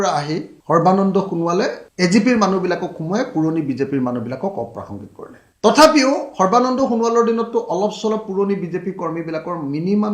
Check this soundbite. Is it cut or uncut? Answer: uncut